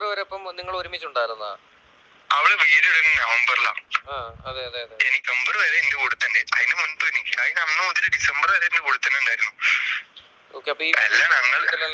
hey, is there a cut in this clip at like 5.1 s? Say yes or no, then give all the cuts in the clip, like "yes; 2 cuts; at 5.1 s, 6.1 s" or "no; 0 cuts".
yes; 1 cut; at 5.1 s